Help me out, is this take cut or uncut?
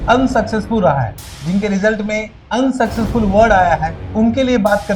cut